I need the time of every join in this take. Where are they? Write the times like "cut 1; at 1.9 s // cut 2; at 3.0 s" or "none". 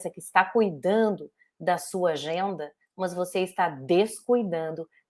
none